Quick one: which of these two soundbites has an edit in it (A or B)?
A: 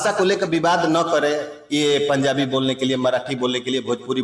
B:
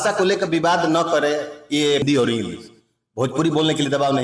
B